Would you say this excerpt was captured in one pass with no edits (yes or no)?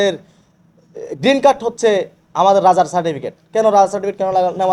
yes